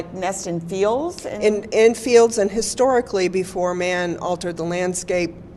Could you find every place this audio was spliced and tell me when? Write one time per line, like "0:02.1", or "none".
none